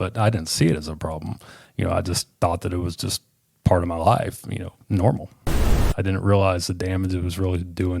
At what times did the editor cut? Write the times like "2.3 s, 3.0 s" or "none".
5.5 s